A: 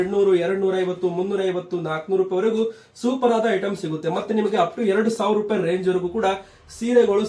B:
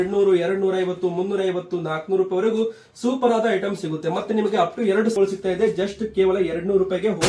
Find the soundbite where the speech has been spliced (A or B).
B